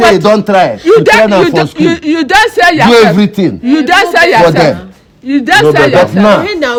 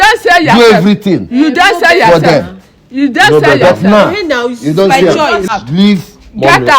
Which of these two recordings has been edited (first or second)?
second